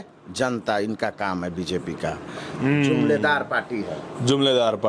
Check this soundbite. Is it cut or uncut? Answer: uncut